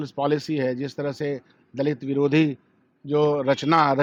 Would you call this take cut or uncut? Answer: uncut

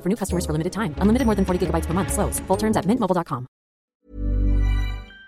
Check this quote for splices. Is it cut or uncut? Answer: cut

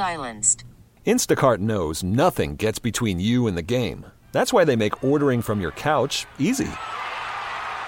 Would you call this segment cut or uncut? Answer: uncut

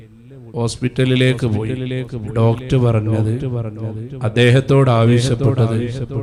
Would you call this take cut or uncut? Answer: uncut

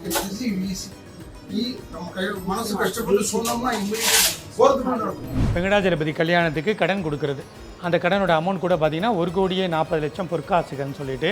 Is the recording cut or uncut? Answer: cut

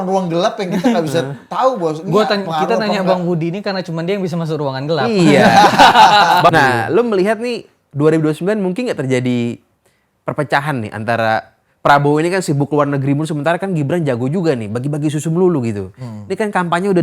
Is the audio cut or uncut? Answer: cut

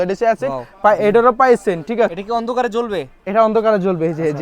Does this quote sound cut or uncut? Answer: cut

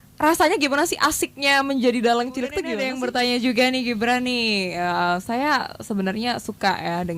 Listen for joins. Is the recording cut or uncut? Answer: cut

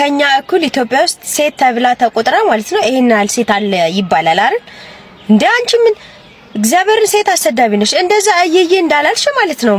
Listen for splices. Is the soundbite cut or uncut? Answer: uncut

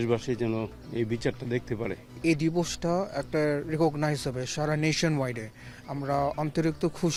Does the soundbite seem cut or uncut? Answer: uncut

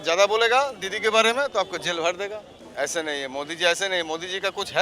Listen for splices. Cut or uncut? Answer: cut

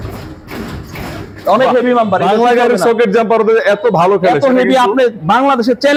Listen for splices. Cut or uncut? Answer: uncut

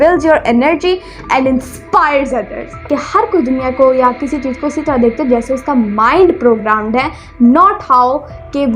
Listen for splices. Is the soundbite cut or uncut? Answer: cut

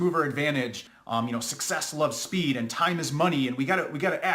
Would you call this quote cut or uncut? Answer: cut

